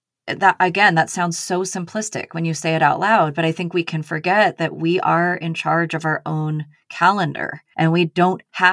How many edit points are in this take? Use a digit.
1